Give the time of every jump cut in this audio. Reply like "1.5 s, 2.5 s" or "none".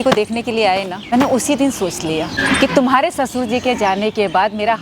1.0 s, 2.4 s

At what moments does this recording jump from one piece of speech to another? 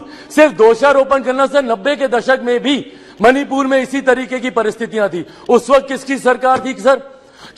none

